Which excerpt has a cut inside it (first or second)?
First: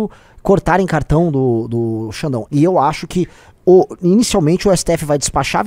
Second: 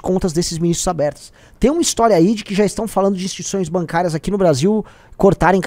first